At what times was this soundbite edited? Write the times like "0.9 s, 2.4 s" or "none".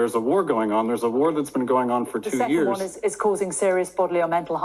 none